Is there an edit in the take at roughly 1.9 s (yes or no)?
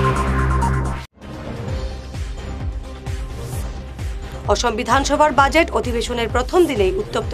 no